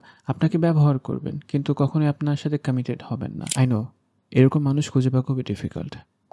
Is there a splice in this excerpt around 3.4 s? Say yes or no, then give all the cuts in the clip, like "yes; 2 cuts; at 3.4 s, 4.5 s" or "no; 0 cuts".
yes; 1 cut; at 3.4 s